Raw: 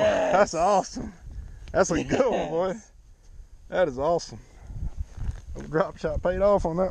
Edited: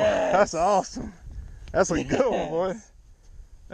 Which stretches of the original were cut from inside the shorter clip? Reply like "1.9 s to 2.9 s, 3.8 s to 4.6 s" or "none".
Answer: none